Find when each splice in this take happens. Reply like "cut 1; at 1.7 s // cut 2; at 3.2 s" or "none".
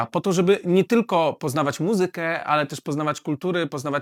none